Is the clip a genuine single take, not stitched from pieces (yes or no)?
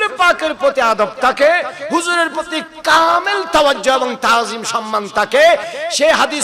yes